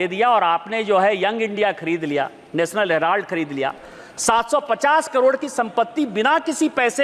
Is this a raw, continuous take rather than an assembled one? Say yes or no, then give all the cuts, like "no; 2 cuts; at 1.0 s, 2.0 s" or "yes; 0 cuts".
yes; 0 cuts